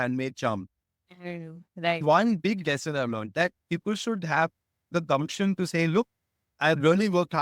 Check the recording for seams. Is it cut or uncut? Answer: cut